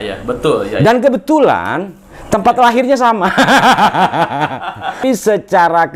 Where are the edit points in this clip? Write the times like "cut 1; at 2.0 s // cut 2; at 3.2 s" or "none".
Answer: cut 1; at 5.0 s